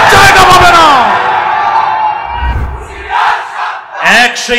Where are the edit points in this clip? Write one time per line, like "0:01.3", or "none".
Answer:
0:02.5